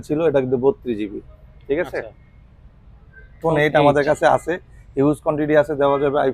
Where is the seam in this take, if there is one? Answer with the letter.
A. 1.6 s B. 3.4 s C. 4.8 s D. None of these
B